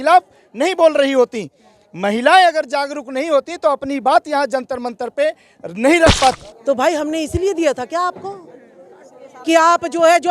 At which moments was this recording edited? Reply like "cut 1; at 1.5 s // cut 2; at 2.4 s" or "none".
cut 1; at 6.5 s